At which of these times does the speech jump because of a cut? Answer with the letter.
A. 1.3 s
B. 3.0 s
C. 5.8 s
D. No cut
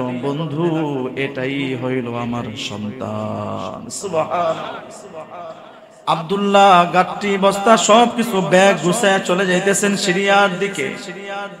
C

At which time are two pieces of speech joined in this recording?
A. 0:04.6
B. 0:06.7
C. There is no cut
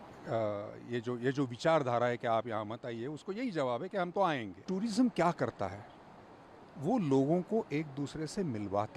A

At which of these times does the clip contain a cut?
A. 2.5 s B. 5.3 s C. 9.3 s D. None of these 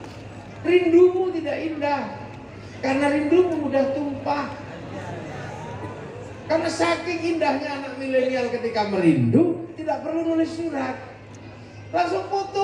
D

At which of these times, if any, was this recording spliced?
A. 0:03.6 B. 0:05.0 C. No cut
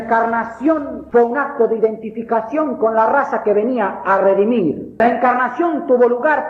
B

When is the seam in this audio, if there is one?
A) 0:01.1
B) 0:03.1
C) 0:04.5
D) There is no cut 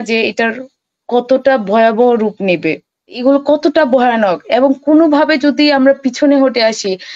B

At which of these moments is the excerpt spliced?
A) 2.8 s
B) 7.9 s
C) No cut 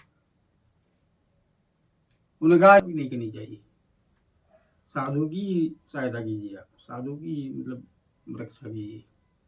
A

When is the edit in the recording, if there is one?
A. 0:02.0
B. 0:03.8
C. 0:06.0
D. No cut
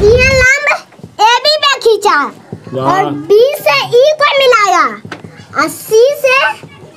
D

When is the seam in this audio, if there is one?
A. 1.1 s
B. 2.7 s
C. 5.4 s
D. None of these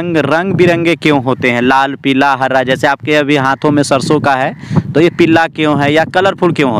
D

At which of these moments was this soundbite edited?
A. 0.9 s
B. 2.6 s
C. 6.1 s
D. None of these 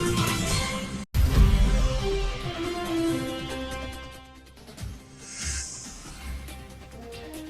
D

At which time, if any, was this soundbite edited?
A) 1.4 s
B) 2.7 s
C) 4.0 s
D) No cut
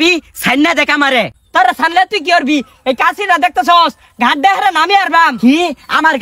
D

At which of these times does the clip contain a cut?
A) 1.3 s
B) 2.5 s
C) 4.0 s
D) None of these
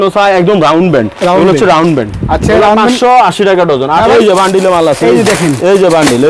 C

